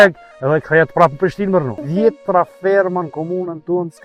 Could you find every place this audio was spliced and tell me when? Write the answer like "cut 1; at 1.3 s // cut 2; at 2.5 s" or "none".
cut 1; at 1.7 s